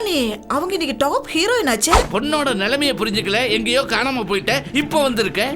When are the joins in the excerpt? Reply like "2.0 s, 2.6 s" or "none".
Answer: 2.1 s